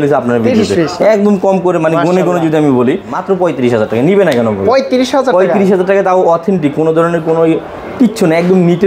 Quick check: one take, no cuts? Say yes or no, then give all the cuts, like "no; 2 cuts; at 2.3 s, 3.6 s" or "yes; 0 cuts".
no; 1 cut; at 3.1 s